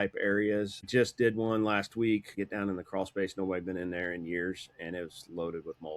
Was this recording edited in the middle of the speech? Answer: yes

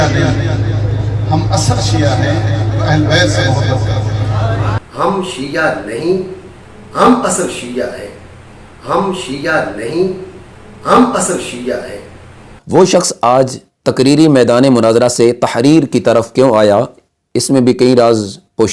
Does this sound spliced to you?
no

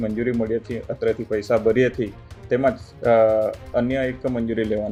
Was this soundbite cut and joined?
no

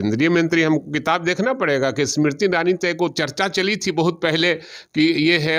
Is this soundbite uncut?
yes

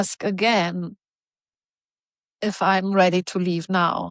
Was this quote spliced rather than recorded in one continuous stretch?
no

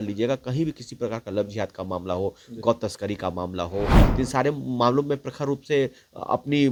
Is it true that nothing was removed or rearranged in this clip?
yes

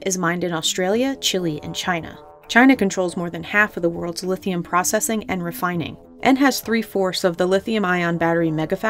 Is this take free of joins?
yes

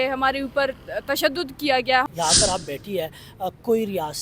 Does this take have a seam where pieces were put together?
yes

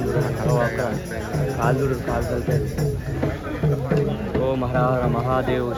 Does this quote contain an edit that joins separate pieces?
no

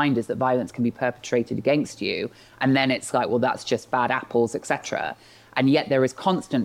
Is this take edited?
no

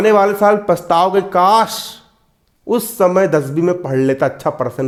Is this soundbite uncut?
yes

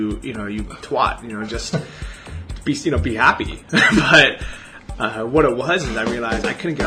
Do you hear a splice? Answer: no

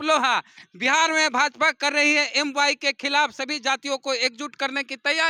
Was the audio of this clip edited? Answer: no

